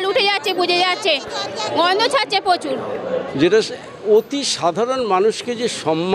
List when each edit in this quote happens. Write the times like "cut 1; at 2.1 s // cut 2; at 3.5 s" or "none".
cut 1; at 3.3 s

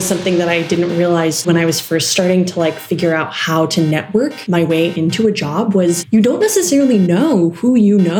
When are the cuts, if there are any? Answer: cut 1; at 1.5 s // cut 2; at 4.4 s // cut 3; at 6.0 s

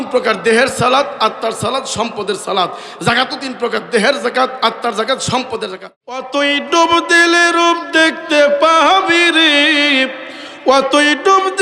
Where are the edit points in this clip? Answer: cut 1; at 5.7 s

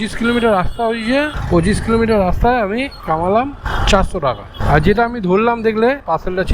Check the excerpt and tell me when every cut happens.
none

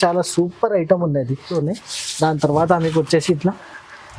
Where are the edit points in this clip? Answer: cut 1; at 1.5 s

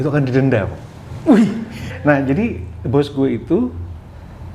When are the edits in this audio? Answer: cut 1; at 1.7 s

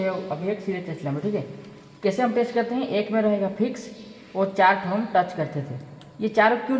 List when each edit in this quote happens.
none

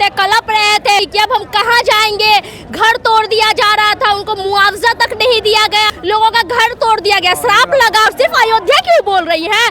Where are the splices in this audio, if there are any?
cut 1; at 1.0 s // cut 2; at 5.9 s // cut 3; at 8.1 s

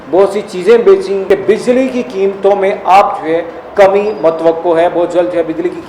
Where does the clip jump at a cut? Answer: cut 1; at 1.2 s

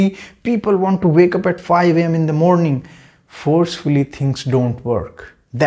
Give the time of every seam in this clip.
none

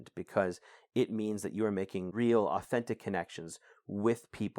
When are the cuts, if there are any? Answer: cut 1; at 2.1 s

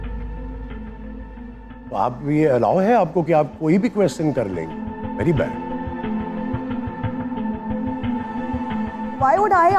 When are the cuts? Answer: none

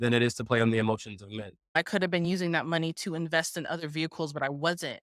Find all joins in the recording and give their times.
cut 1; at 1.5 s

